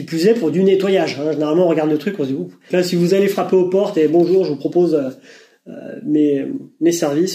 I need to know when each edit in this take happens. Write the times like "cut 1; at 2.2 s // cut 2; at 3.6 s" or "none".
cut 1; at 2.6 s